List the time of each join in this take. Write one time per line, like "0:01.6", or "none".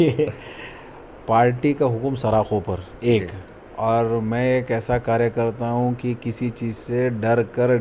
none